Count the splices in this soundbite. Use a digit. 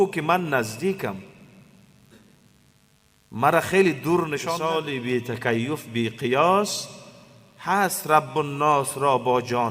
1